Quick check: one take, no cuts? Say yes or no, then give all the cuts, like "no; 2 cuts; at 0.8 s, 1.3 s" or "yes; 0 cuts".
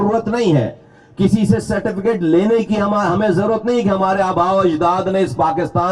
yes; 0 cuts